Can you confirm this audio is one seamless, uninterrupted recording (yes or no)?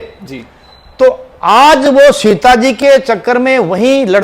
yes